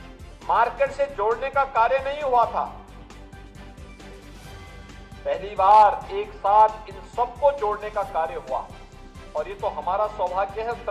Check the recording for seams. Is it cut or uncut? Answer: cut